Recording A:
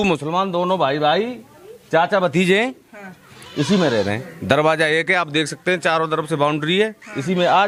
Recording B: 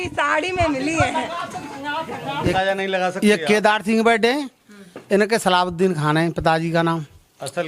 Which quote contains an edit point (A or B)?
B